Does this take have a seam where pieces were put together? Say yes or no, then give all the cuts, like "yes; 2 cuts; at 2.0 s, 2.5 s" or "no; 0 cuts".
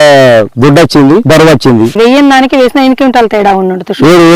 no; 0 cuts